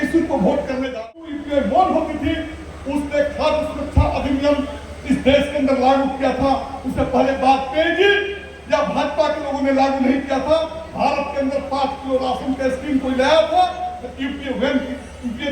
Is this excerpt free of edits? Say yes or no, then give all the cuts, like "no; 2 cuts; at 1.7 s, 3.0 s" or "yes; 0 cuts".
no; 1 cut; at 1.0 s